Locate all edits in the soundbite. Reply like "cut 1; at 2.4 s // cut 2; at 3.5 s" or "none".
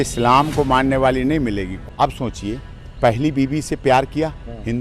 cut 1; at 1.8 s